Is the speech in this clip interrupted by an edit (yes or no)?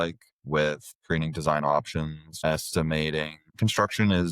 yes